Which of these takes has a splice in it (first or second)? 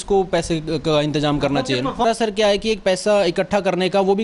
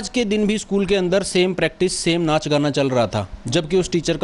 first